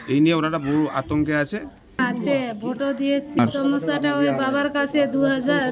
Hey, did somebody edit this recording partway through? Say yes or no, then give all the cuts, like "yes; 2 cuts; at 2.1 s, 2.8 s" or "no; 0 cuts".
yes; 2 cuts; at 2.0 s, 3.4 s